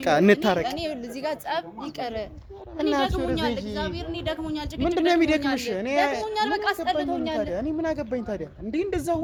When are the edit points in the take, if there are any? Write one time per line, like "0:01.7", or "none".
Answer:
none